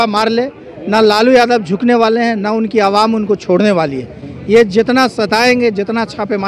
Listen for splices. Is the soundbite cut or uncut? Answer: uncut